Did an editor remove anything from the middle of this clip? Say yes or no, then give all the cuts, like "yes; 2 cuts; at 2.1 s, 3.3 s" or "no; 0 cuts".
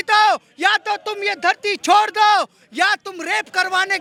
no; 0 cuts